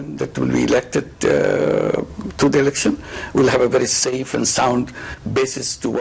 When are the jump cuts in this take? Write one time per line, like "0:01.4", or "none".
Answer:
none